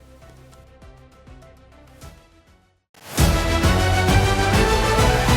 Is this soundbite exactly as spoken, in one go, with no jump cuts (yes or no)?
no